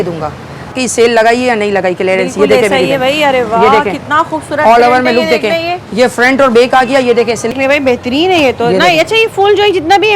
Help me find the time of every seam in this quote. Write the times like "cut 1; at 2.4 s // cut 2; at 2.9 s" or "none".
cut 1; at 0.7 s // cut 2; at 7.5 s